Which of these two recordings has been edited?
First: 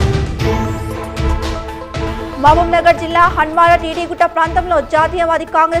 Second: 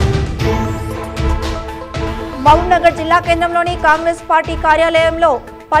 second; 1 cut; at 2.3 s

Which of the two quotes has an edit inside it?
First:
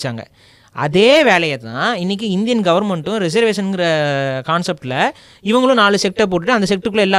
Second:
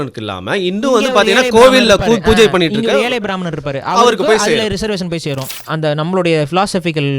second; 1 cut; at 5.4 s

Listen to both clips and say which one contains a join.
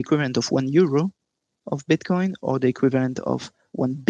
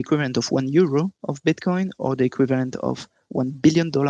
second; 1 cut; at 1.2 s

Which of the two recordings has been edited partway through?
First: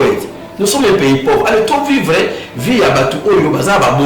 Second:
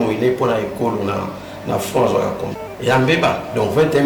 second; 1 cut; at 2.6 s

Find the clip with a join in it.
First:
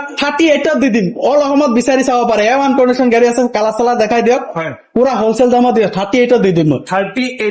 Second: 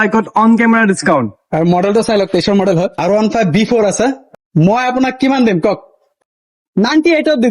second; 3 cuts; at 2.9 s, 4.2 s, 6.1 s

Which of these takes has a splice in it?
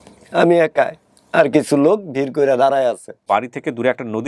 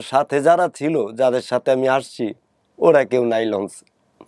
first; 1 cut; at 3.2 s

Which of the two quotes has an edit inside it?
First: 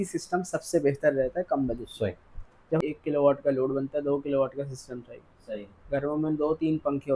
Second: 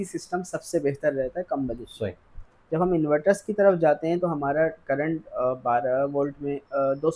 first; 1 cut; at 2.8 s

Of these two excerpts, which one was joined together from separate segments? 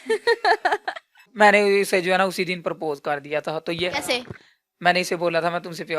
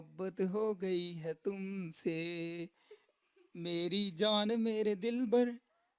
first; 1 cut; at 1.3 s

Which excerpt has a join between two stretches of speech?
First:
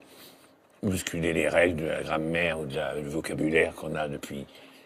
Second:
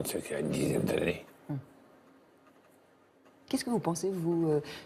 first; 1 cut; at 3.5 s

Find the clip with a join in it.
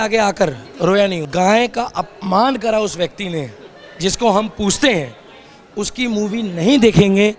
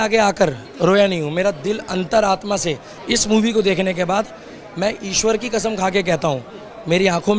first; 1 cut; at 1.2 s

